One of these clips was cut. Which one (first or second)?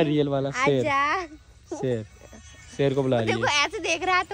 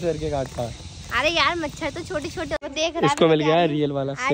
second